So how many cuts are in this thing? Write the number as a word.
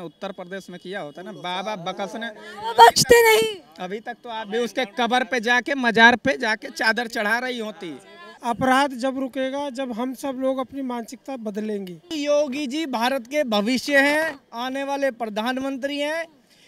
two